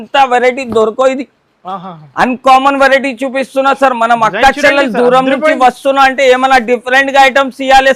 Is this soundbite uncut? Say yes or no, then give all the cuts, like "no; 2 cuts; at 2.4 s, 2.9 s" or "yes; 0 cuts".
yes; 0 cuts